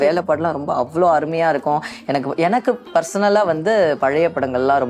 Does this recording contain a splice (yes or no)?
no